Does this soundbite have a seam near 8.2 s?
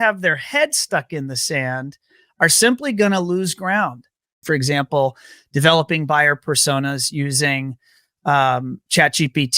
no; 1 cut; at 4.4 s

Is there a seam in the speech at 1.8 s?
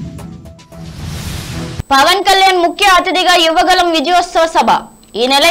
yes; 1 cut; at 1.8 s

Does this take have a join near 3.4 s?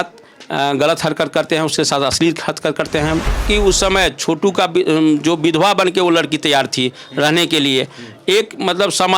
yes; 1 cut; at 3.4 s

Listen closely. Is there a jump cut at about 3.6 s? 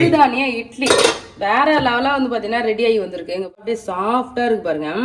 yes; 1 cut; at 3.6 s

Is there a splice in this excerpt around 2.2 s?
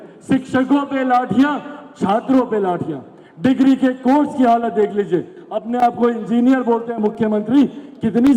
no; 0 cuts

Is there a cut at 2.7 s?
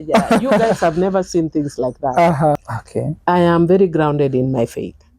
yes; 1 cut; at 2.7 s

